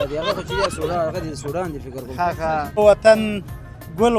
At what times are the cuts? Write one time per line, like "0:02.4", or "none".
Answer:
0:02.8

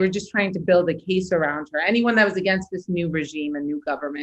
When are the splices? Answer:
none

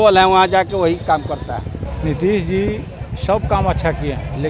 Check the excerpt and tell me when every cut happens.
0:01.8

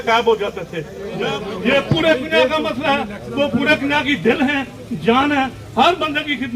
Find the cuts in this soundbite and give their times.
0:01.0

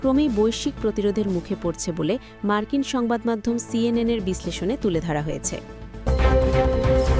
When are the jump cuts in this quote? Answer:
0:06.0

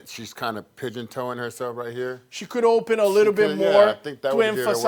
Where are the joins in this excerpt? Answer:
none

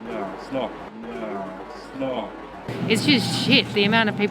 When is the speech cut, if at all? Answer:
0:02.6

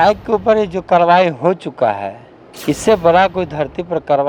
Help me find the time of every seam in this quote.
none

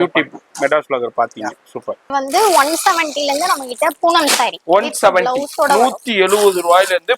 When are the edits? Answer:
0:02.1

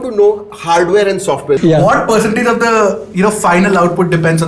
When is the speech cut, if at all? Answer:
0:01.6

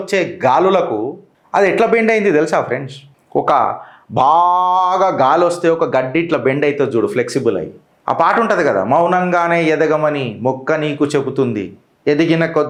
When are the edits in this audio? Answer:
none

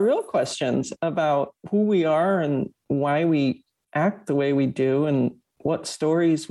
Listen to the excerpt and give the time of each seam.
0:01.6

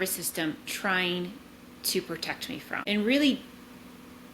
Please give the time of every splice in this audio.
0:02.8

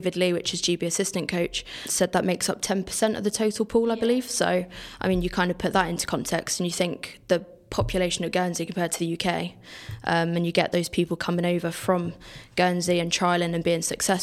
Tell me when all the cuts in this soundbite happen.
0:01.8

